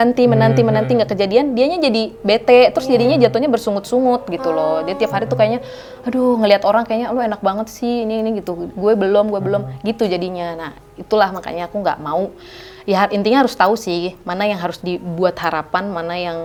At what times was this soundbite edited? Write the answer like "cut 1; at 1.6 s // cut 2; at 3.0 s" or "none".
none